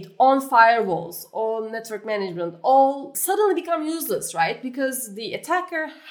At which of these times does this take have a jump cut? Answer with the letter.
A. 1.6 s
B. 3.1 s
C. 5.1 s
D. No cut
B